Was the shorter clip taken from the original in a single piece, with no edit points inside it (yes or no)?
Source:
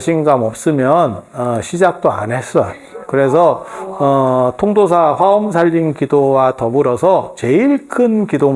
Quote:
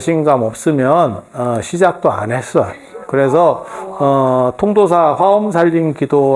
yes